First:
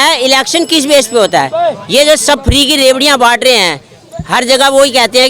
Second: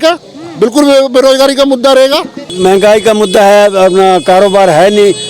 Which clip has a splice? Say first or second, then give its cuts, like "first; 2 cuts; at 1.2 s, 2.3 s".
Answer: second; 1 cut; at 2.5 s